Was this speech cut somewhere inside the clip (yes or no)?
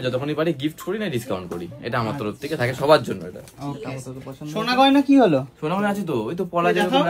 no